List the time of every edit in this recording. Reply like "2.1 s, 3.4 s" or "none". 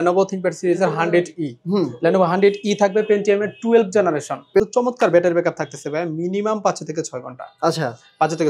4.6 s